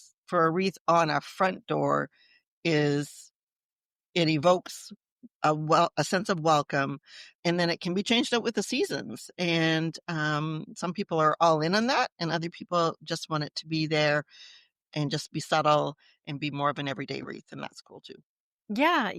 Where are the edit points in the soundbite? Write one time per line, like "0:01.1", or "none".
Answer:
none